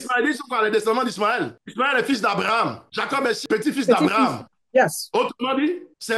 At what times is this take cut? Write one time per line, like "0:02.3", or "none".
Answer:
0:01.5
0:03.1